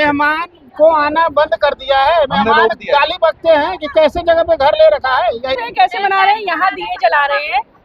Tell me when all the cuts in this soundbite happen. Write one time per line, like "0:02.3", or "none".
0:05.5